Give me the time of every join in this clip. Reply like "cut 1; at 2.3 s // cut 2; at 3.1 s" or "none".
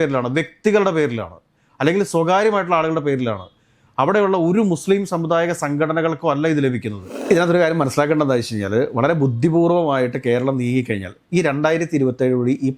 cut 1; at 7.2 s